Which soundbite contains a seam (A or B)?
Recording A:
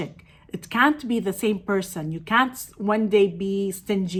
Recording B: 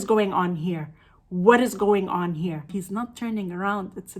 B